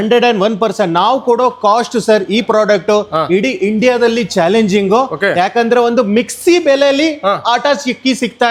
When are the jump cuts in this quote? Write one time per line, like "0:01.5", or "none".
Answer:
none